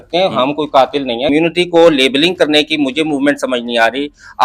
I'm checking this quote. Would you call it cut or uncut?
cut